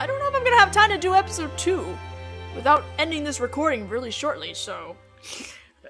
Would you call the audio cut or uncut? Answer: cut